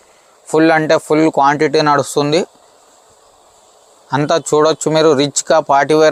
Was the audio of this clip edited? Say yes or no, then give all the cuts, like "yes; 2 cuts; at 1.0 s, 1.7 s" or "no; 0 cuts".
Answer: no; 0 cuts